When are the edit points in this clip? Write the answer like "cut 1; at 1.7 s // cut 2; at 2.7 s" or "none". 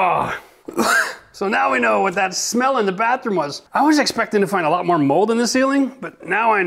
cut 1; at 3.6 s